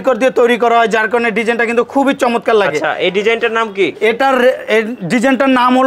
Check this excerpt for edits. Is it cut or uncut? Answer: uncut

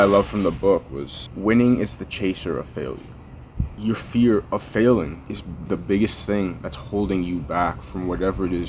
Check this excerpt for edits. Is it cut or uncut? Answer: cut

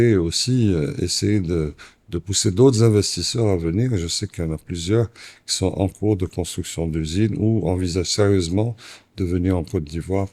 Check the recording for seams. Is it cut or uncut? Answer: uncut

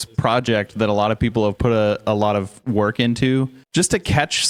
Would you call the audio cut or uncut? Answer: uncut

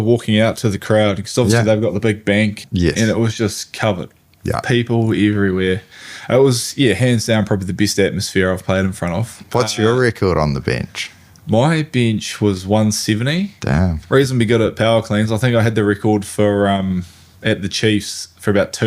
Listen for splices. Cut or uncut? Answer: cut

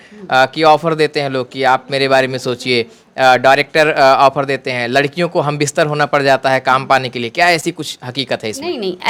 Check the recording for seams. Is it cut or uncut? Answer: uncut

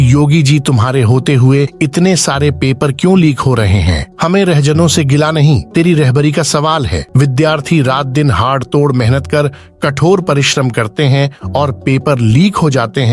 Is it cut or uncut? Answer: cut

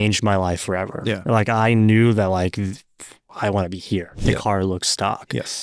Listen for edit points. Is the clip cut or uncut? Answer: cut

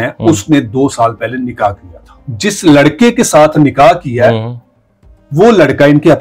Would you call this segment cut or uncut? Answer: uncut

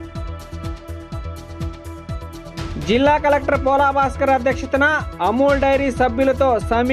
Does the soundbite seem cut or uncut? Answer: cut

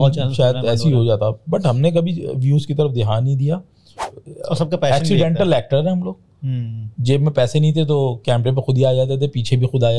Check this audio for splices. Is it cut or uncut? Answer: cut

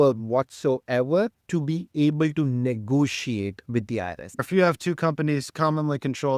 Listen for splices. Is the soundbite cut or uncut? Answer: cut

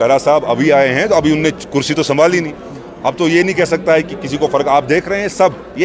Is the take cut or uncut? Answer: uncut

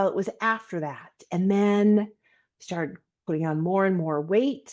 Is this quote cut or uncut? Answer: uncut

